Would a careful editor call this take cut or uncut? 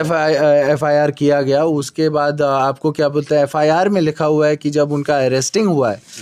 uncut